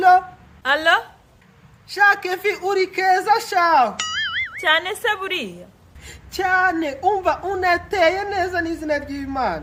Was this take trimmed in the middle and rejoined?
no; 0 cuts

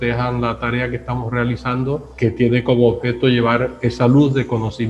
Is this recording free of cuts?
no; 1 cut; at 2.1 s

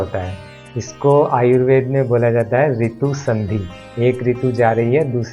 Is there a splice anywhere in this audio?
yes; 1 cut; at 3.8 s

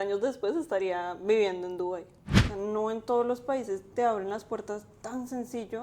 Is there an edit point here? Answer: yes; 1 cut; at 2.4 s

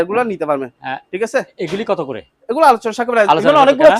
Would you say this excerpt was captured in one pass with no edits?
yes; 0 cuts

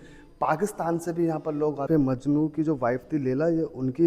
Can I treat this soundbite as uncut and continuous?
no; 1 cut; at 1.9 s

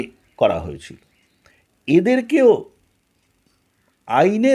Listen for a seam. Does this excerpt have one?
no; 0 cuts

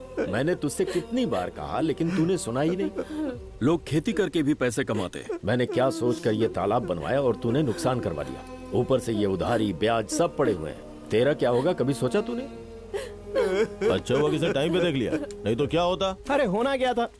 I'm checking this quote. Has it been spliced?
no; 0 cuts

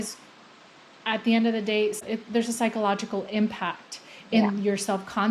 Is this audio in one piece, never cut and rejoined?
no; 1 cut; at 2.0 s

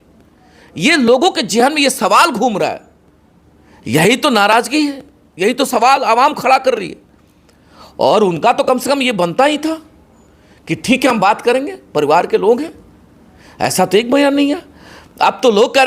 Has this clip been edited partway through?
no; 0 cuts

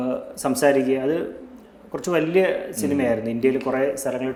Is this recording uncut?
yes; 0 cuts

